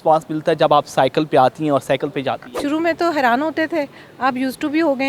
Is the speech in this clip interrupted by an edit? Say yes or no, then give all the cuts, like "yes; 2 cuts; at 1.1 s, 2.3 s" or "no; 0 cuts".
yes; 1 cut; at 2.6 s